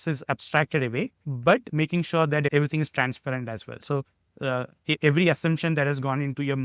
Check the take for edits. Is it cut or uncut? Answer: cut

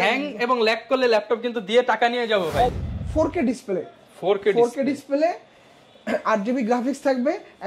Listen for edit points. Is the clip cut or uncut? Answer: cut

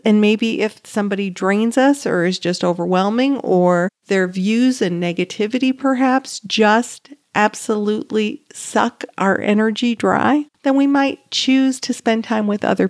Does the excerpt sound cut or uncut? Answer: cut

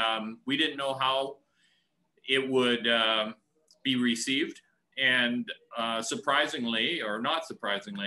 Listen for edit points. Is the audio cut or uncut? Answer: uncut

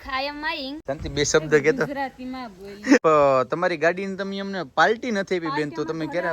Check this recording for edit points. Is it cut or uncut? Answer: cut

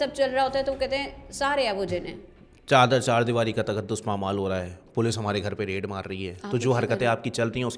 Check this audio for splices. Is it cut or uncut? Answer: uncut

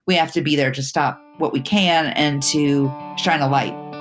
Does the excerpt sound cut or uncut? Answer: cut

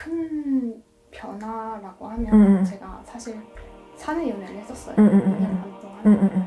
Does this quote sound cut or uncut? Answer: uncut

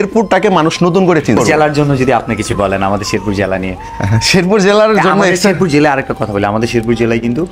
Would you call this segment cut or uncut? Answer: cut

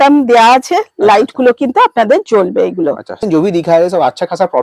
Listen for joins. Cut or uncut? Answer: cut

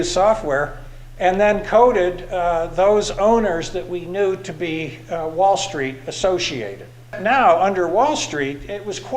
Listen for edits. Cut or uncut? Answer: cut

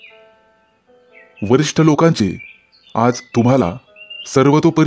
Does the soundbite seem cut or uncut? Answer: cut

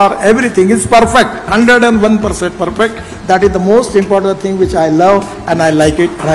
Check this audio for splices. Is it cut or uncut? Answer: uncut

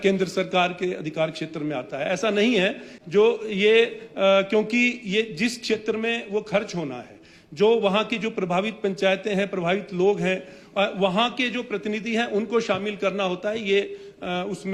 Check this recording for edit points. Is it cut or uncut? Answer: uncut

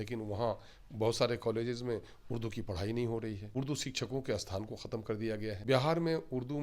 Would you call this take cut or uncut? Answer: cut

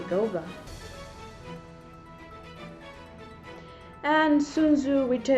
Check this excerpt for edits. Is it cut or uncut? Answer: uncut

